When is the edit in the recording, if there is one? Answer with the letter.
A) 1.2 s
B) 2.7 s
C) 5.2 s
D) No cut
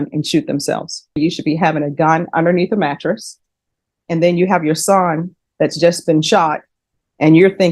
A